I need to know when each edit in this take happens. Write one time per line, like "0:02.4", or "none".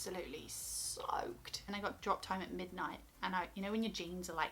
0:01.7